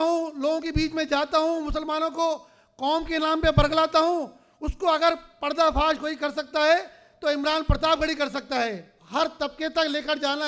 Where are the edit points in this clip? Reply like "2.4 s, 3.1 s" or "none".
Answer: 8.9 s